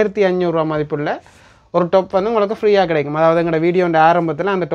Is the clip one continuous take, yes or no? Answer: yes